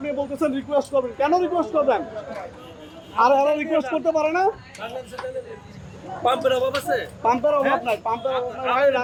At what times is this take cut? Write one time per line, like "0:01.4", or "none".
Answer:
none